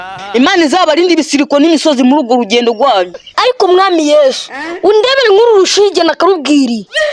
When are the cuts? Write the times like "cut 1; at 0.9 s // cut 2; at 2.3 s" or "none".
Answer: cut 1; at 3.3 s

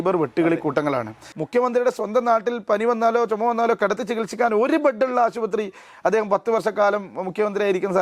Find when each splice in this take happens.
cut 1; at 1.3 s

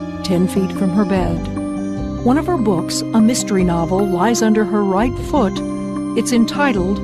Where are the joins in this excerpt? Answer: none

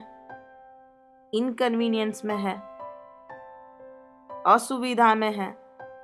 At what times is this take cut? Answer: none

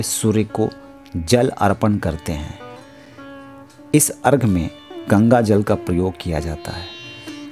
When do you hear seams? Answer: none

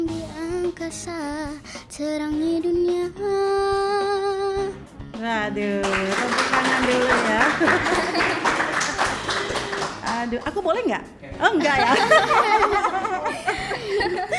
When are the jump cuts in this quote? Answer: none

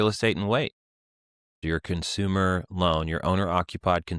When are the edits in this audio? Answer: cut 1; at 1.5 s

